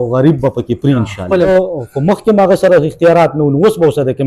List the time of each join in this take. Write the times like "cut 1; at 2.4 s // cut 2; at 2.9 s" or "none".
cut 1; at 1.5 s